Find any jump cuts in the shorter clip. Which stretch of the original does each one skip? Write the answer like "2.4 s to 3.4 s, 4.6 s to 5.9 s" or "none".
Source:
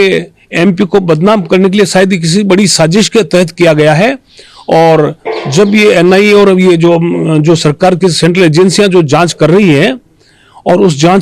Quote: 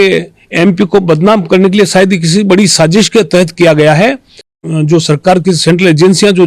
4.6 s to 7.2 s